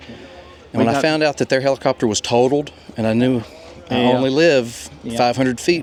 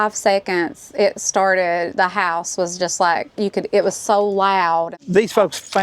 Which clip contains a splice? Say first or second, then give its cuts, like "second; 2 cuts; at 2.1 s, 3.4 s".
second; 1 cut; at 4.9 s